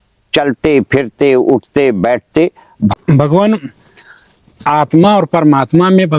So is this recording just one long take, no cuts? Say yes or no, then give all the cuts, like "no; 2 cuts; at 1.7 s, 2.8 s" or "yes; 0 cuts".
no; 1 cut; at 2.9 s